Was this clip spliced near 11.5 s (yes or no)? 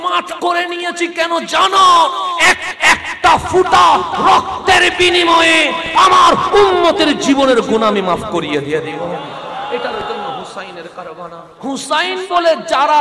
yes